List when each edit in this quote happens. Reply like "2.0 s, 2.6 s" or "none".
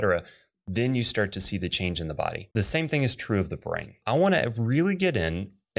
2.4 s, 4.0 s

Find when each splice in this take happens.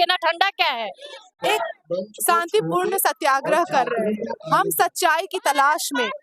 1.3 s

